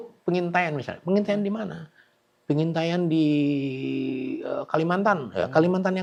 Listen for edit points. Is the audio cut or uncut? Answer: uncut